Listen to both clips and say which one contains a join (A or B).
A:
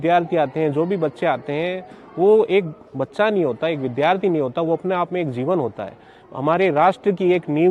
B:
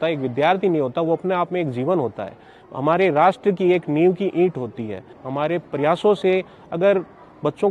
B